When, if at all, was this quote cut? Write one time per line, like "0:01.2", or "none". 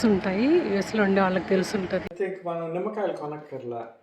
0:02.0